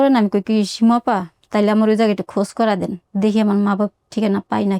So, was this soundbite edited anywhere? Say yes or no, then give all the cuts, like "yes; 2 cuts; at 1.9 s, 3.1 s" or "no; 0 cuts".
no; 0 cuts